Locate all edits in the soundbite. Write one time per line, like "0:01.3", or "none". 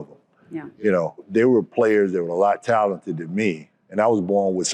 0:01.3
0:03.7